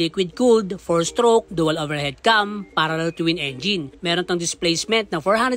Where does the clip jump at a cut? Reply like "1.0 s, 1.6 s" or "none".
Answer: none